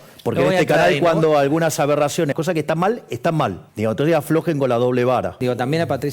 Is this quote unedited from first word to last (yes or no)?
no